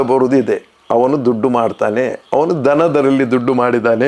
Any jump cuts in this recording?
no; 0 cuts

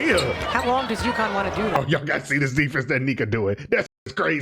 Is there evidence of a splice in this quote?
yes; 1 cut; at 1.8 s

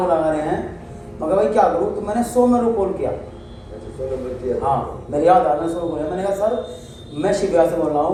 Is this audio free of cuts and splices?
yes; 0 cuts

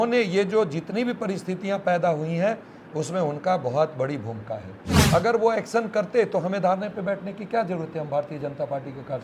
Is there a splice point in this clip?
yes; 1 cut; at 4.9 s

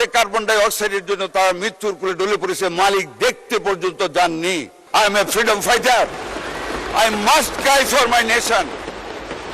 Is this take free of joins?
no; 1 cut; at 4.7 s

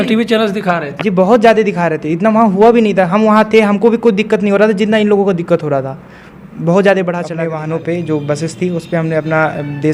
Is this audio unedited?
no; 1 cut; at 7.5 s

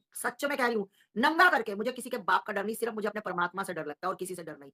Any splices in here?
no; 0 cuts

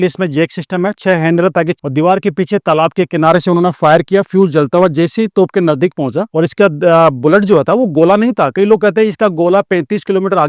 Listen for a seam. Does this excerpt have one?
yes; 2 cuts; at 1.8 s, 6.3 s

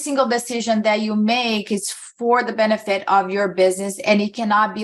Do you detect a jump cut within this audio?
no; 0 cuts

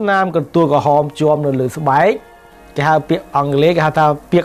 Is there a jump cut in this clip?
no; 0 cuts

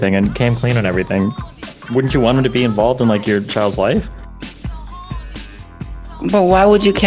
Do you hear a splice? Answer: no; 0 cuts

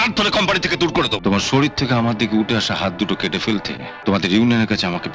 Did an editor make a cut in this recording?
yes; 2 cuts; at 1.1 s, 3.9 s

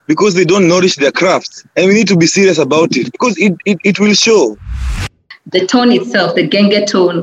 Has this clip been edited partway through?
yes; 3 cuts; at 1.6 s, 3.0 s, 5.2 s

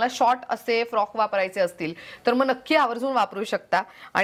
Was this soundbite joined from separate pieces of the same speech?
no; 0 cuts

